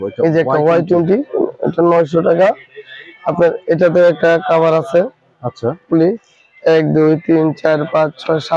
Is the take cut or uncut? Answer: uncut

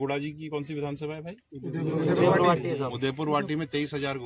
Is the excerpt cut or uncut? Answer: uncut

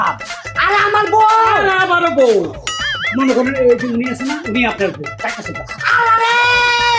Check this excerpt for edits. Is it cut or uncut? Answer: cut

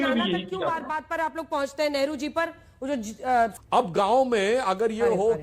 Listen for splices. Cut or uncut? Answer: cut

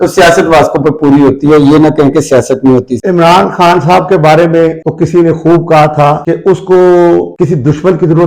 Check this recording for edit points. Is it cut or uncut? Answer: cut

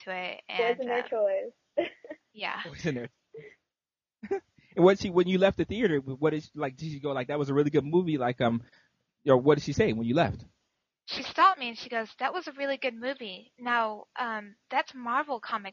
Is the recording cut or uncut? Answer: uncut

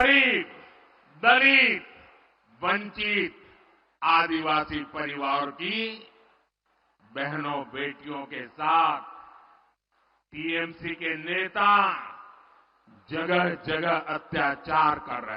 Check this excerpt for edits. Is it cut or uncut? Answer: uncut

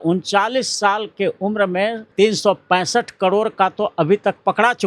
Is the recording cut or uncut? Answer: cut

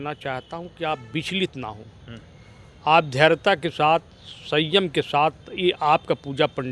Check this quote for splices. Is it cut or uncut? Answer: uncut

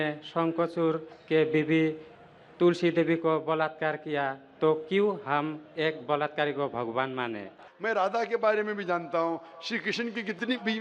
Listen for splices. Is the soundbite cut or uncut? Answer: cut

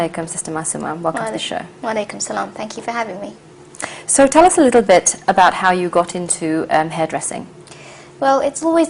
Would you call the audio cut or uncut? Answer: uncut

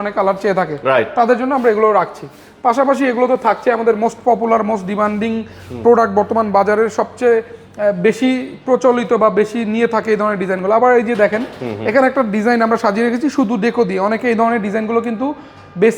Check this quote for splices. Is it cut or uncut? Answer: uncut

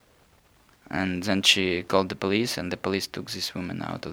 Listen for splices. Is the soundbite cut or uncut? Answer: uncut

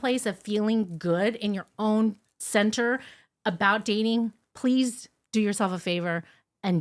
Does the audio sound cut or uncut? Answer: uncut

